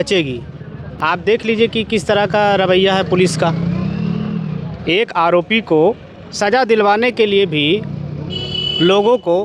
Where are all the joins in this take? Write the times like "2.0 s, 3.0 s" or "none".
none